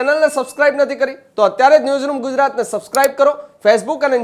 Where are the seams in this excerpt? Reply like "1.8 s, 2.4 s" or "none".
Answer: none